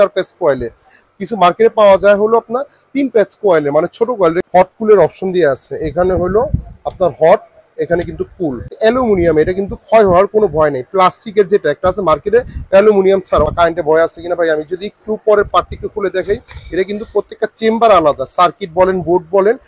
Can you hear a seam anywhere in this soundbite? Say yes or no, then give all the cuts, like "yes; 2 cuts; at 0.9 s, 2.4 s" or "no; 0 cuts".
yes; 3 cuts; at 4.4 s, 8.7 s, 13.5 s